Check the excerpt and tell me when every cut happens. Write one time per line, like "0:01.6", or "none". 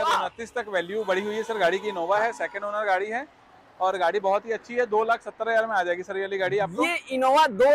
none